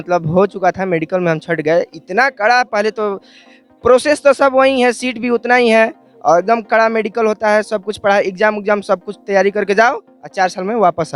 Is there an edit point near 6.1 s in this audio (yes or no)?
no